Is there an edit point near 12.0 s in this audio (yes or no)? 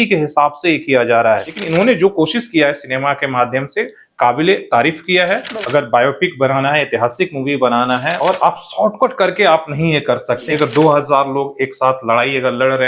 no